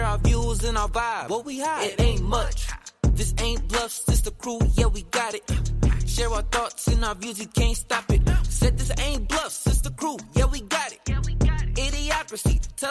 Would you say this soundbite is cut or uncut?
uncut